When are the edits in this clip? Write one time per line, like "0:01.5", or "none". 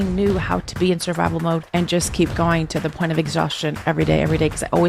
0:01.7